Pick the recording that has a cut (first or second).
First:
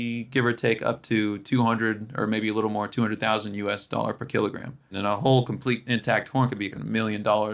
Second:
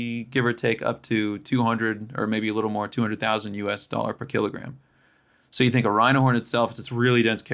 first